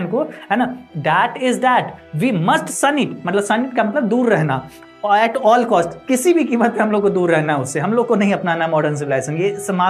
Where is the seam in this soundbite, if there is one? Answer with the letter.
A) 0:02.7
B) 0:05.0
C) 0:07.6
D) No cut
D